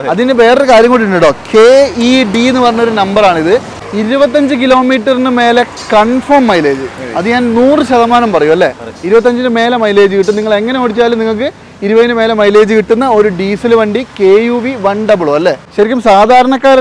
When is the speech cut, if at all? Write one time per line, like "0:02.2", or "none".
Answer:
0:03.9
0:15.6